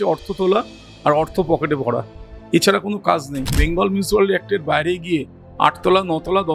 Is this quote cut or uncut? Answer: cut